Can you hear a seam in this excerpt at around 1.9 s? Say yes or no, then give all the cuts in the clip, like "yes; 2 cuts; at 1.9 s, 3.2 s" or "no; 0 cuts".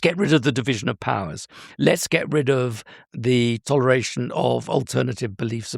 no; 1 cut; at 3.2 s